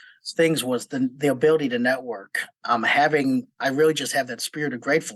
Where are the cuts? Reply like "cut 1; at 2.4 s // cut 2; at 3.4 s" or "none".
none